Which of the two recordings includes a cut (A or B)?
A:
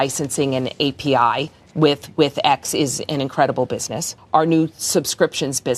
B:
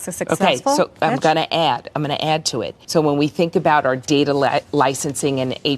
B